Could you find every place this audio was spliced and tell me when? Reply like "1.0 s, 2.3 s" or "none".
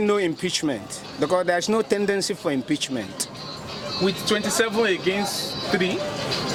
none